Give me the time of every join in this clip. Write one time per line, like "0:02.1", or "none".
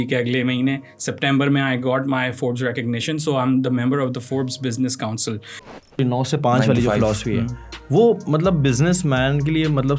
0:06.0